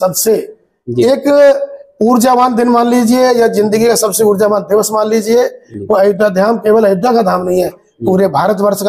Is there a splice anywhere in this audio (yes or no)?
yes